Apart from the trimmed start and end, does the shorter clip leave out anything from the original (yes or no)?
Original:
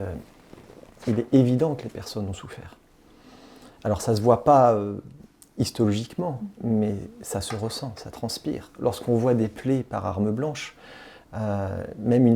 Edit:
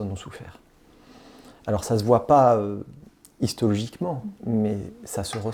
no